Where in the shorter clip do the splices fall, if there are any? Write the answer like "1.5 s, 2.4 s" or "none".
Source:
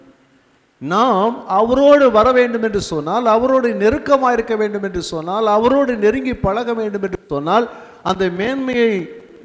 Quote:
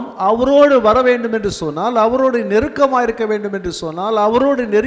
none